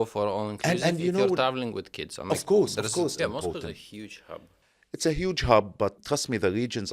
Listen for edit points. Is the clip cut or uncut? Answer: cut